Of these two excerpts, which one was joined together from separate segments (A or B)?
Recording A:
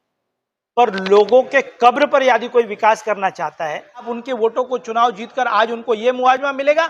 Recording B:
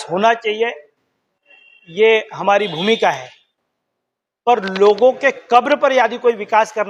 A